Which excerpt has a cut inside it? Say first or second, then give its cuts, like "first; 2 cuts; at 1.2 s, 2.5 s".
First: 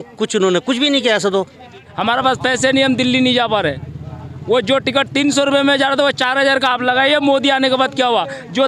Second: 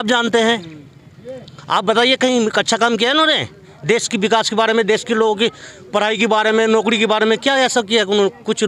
first; 1 cut; at 1.9 s